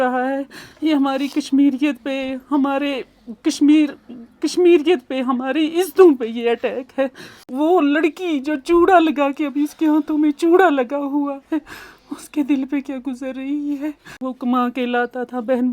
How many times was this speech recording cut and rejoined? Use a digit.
2